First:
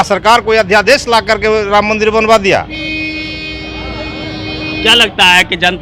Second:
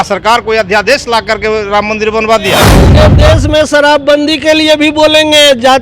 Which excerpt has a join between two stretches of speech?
second; 1 cut; at 2.9 s

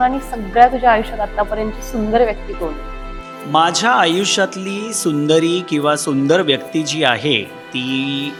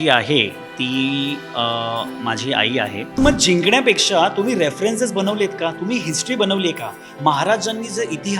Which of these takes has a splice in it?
second; 1 cut; at 3.2 s

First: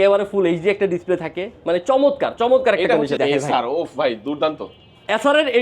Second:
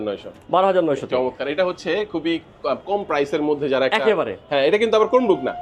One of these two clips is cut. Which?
first; 1 cut; at 3.2 s

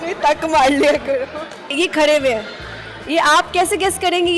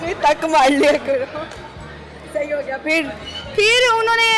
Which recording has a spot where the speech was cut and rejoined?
first; 1 cut; at 1.7 s

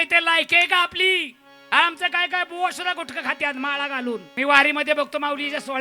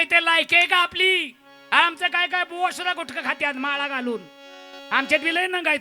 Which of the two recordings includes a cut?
first; 1 cut; at 4.3 s

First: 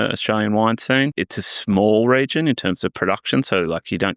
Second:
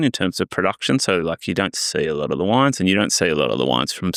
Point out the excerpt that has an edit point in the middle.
first; 1 cut; at 1.2 s

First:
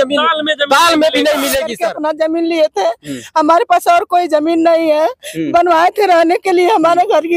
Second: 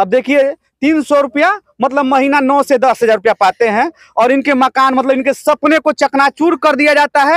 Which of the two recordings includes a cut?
first; 1 cut; at 1.9 s

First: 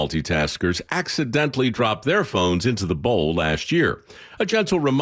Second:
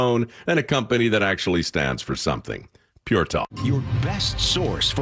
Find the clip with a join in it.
second; 1 cut; at 3.4 s

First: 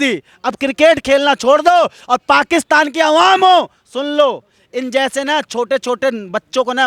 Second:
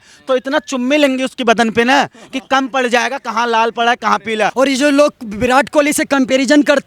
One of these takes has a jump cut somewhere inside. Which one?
second; 1 cut; at 4.5 s

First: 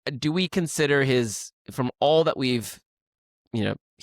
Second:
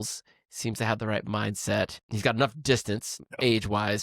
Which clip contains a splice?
second; 2 cuts; at 2.0 s, 3.2 s

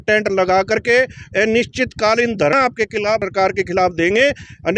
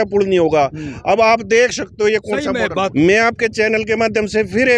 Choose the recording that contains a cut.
second; 1 cut; at 2.9 s

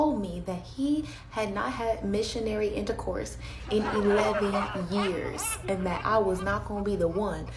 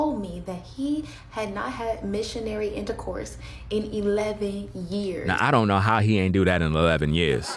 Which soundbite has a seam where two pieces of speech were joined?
first; 1 cut; at 5.3 s

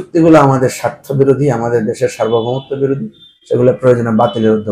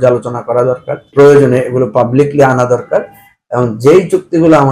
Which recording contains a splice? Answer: second; 1 cut; at 1.0 s

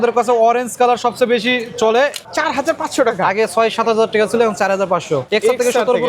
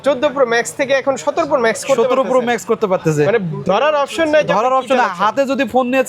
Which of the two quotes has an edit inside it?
first; 2 cuts; at 2.2 s, 5.2 s

